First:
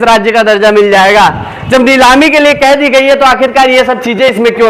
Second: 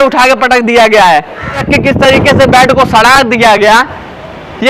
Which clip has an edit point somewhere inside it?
second; 1 cut; at 1.7 s

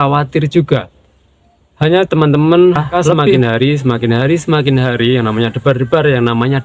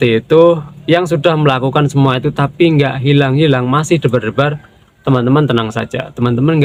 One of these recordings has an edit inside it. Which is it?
first; 1 cut; at 3.3 s

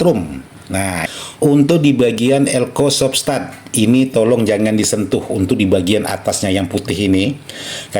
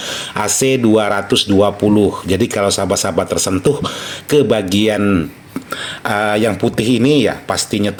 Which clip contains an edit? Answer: first; 1 cut; at 1.0 s

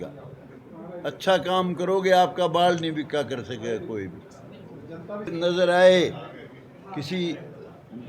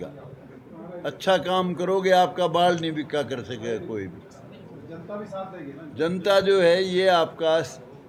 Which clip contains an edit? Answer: first; 1 cut; at 5.3 s

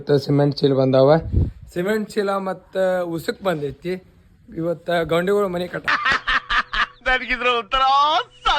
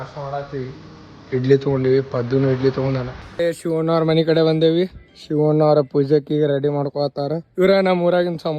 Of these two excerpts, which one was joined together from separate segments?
second; 2 cuts; at 3.3 s, 7.4 s

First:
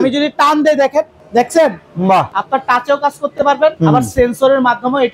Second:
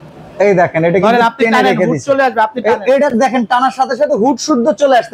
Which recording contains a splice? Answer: first; 3 cuts; at 1.2 s, 2.4 s, 3.8 s

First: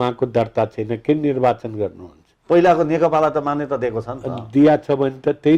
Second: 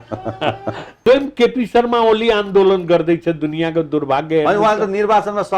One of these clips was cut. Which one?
second; 1 cut; at 0.9 s

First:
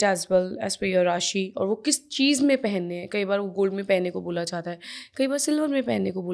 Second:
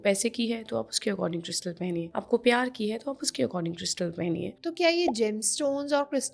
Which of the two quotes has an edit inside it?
second; 2 cuts; at 2.1 s, 4.5 s

